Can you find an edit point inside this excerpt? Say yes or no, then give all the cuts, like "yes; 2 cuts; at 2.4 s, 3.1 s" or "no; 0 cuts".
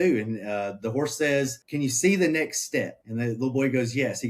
yes; 2 cuts; at 1.6 s, 3.0 s